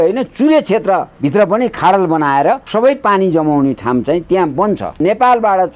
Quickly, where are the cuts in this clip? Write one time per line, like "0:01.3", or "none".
0:01.1
0:02.7
0:05.0